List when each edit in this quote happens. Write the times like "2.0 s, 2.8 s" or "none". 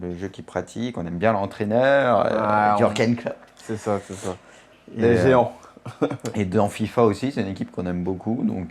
2.8 s

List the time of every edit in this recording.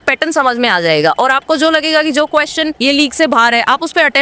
2.7 s

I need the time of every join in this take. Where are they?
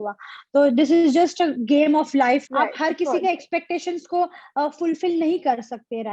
2.4 s

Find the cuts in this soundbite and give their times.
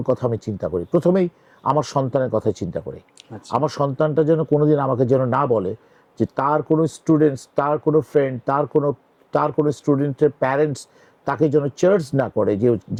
none

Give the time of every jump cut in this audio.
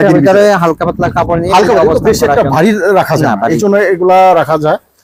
none

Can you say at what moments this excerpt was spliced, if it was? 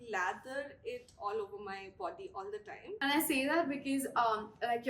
3.0 s

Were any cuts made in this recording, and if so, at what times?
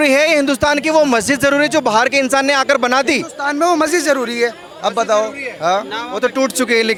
none

